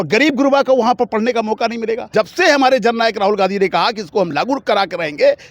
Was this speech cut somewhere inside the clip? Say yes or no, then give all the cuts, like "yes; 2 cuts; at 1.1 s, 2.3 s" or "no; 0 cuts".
yes; 1 cut; at 2.1 s